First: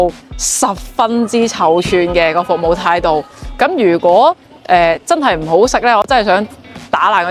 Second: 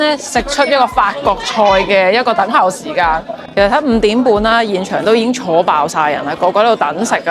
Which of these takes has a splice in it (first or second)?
second